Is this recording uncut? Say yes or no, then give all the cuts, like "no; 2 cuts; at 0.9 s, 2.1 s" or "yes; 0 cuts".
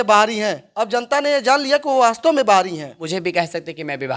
no; 1 cut; at 3.1 s